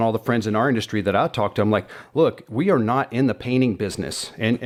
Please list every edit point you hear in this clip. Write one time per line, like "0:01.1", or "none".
none